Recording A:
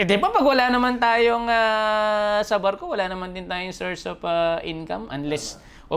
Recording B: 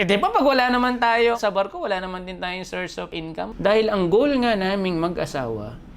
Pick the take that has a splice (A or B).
B